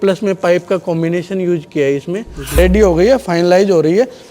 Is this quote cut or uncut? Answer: cut